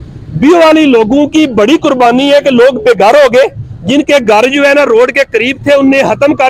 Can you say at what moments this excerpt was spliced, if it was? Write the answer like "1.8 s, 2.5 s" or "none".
none